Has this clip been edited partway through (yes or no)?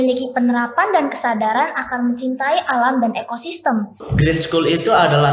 yes